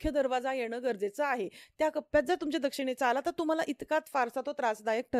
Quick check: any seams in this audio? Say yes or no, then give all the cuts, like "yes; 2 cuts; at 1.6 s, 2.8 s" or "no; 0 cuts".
no; 0 cuts